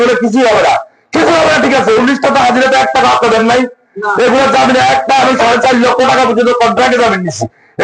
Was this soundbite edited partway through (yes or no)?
no